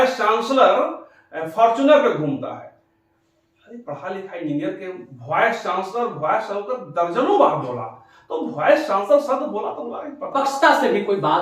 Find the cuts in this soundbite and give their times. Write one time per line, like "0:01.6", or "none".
0:10.3